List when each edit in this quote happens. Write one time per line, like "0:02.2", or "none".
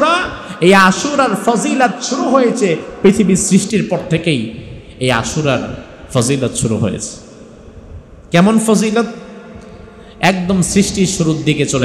0:03.7